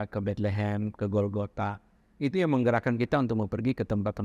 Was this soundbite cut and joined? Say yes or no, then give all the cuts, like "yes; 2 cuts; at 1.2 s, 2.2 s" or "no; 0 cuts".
no; 0 cuts